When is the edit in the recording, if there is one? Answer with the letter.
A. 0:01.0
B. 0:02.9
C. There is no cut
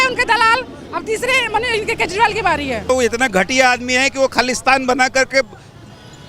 B